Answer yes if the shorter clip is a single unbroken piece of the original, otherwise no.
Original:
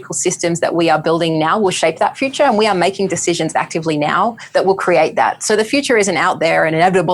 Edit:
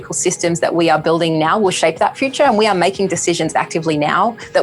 yes